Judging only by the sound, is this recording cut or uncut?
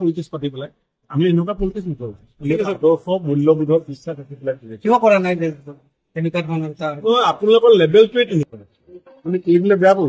cut